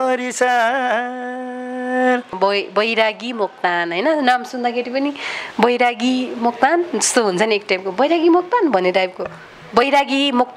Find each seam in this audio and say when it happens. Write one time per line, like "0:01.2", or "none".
0:02.3